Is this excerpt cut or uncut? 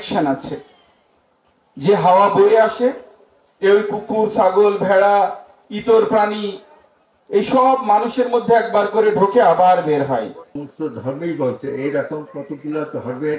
cut